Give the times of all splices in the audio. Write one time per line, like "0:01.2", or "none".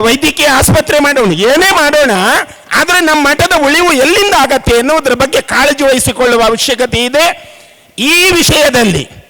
none